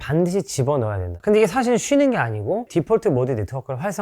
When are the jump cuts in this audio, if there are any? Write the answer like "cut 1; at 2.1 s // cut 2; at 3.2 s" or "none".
cut 1; at 1.1 s